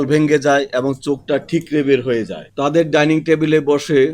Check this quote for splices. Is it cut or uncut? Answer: cut